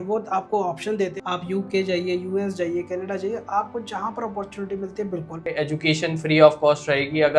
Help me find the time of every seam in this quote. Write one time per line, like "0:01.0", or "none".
0:01.2
0:05.6

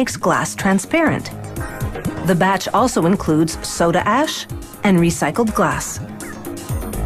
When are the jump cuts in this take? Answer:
0:01.2

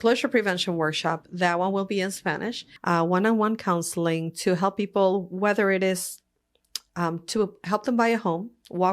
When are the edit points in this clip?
0:02.7

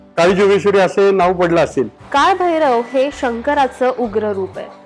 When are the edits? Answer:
0:02.0

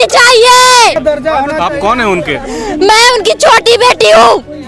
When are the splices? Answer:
0:01.0

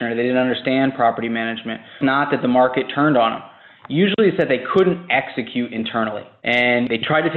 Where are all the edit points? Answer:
0:02.0
0:06.3

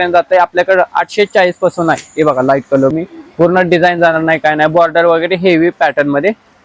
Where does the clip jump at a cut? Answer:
0:02.9

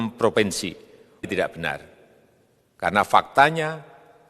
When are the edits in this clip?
0:01.2

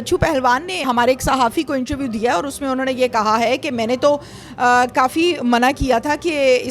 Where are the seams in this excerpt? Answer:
none

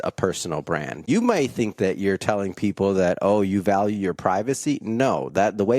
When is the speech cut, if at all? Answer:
0:01.0

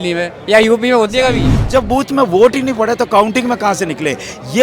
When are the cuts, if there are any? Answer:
0:01.5

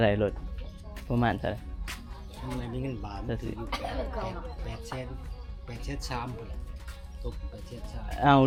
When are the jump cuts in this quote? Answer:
none

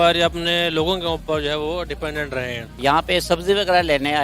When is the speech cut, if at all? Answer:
0:02.7

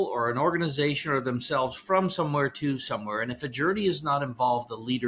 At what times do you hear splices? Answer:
none

